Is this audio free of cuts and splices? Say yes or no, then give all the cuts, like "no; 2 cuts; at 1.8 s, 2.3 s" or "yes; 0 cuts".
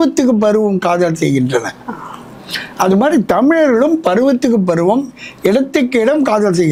yes; 0 cuts